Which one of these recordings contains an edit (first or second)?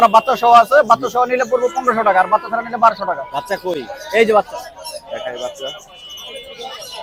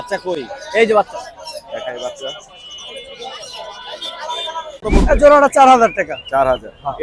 second